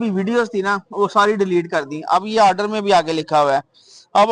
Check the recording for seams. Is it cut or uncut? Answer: uncut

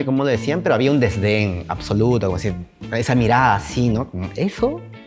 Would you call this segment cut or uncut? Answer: uncut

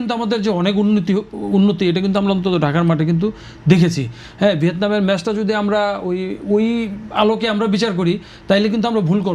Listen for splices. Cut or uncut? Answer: uncut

